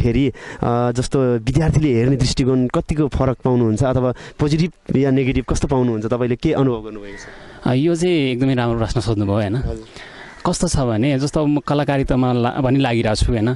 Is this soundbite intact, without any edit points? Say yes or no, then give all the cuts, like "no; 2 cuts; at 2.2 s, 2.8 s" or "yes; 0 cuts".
yes; 0 cuts